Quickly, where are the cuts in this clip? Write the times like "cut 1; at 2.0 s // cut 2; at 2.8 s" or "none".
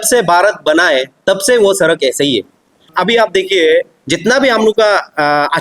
cut 1; at 2.9 s

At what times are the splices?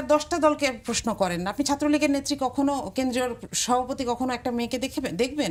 none

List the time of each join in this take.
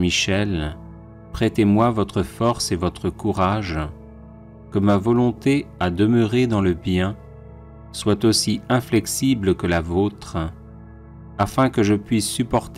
cut 1; at 11.7 s

